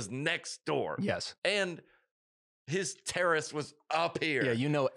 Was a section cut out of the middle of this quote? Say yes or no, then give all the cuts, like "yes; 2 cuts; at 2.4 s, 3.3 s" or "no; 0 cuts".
no; 0 cuts